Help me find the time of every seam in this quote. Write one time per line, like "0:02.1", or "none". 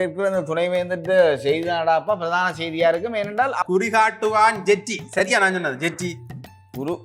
0:03.6